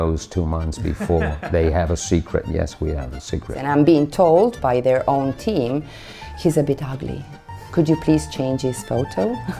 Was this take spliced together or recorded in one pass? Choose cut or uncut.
cut